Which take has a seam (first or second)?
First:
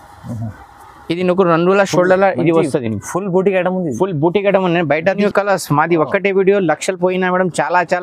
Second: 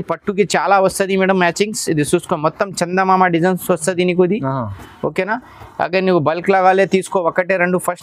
first